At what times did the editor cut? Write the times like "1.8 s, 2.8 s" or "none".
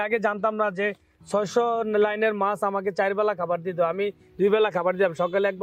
none

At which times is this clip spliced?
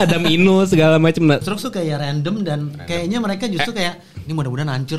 1.4 s

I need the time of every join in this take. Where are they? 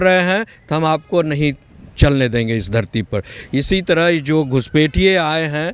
none

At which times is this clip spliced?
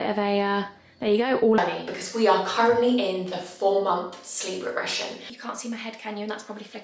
1.6 s, 5.3 s

